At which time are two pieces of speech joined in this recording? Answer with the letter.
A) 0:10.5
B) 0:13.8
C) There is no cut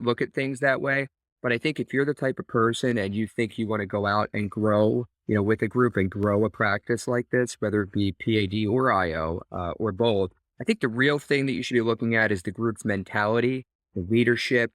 A